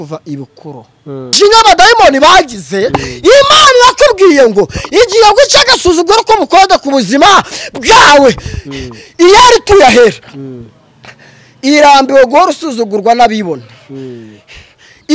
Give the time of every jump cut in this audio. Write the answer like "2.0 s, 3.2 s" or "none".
1.3 s